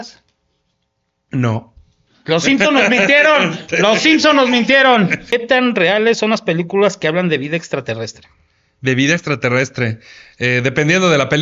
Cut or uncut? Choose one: cut